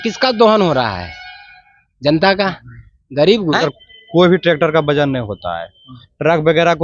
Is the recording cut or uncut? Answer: cut